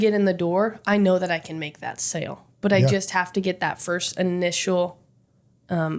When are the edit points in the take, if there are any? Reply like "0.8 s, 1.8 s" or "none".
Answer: none

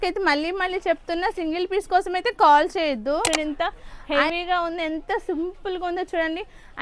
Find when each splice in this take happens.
3.3 s

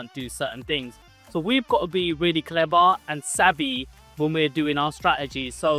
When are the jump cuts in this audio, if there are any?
none

